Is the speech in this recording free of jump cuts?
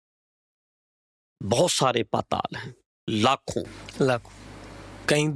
yes; 0 cuts

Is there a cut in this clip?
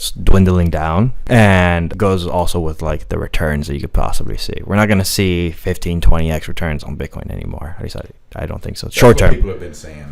yes; 2 cuts; at 1.2 s, 1.9 s

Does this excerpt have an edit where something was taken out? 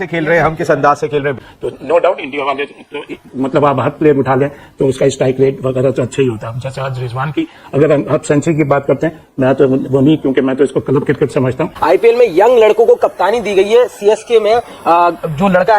yes; 2 cuts; at 1.5 s, 11.7 s

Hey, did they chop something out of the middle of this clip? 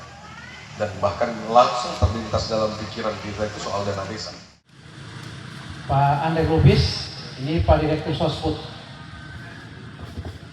yes; 1 cut; at 5.0 s

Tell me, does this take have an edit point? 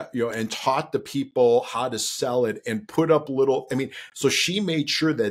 no; 0 cuts

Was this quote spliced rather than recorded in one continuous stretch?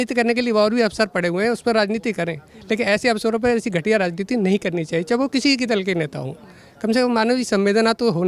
no; 0 cuts

